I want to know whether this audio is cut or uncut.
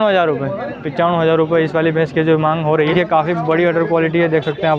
cut